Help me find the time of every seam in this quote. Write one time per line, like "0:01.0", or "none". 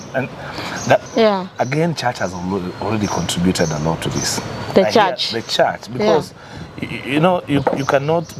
0:01.0